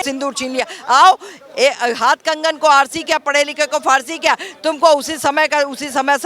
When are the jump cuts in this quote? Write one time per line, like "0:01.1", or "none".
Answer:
none